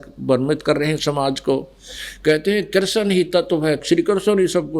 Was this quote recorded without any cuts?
no; 1 cut; at 3.8 s

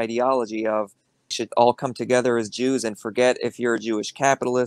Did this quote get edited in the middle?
yes; 1 cut; at 1.4 s

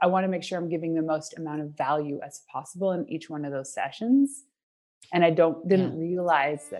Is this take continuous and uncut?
yes; 0 cuts

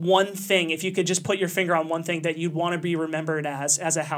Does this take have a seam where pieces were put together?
no; 0 cuts

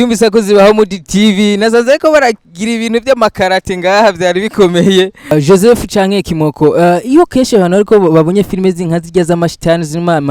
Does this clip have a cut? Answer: yes; 1 cut; at 5.3 s

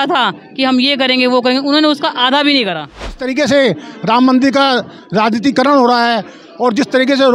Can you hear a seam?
yes; 1 cut; at 3.2 s

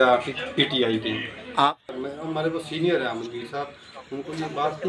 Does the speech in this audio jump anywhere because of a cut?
yes; 1 cut; at 1.7 s

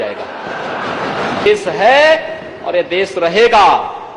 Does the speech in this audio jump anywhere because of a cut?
yes; 1 cut; at 1.5 s

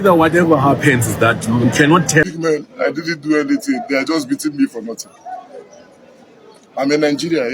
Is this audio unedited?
no; 1 cut; at 2.2 s

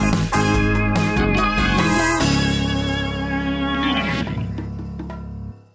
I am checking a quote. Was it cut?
no; 0 cuts

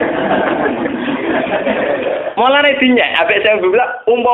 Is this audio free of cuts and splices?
yes; 0 cuts

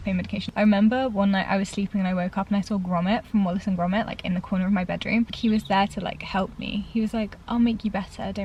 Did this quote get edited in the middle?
no; 0 cuts

